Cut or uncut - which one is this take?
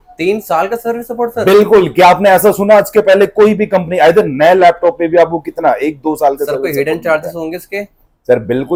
uncut